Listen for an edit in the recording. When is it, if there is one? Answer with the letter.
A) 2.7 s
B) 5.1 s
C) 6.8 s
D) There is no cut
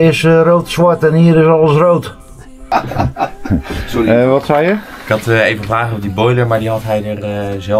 A